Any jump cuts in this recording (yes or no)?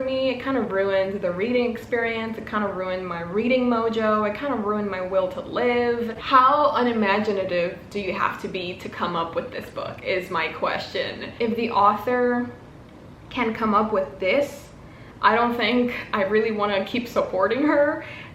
yes